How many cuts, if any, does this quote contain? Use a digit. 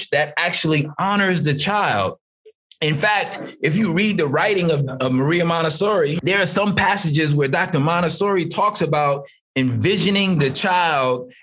1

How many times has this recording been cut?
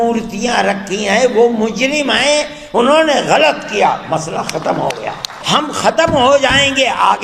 1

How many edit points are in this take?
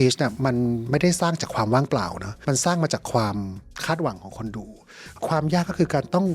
1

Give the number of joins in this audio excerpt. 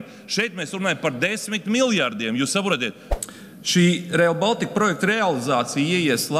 1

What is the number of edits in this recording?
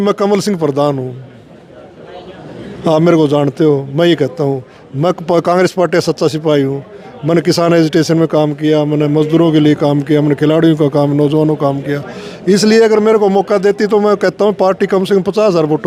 0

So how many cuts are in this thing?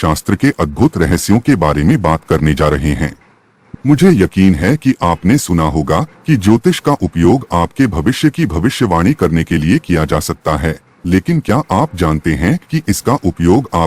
1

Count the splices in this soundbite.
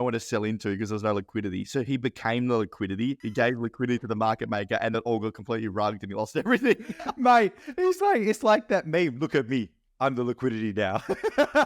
2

